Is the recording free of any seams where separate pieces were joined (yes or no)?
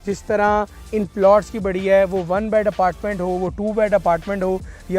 yes